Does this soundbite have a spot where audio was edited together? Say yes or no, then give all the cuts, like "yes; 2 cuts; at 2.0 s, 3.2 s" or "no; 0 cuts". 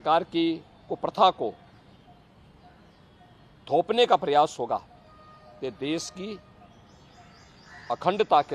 no; 0 cuts